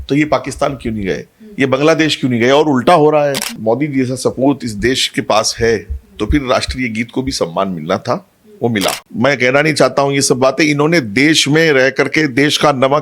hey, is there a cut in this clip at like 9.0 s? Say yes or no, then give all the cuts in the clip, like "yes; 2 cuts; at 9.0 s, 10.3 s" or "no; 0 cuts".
yes; 2 cuts; at 3.5 s, 9.0 s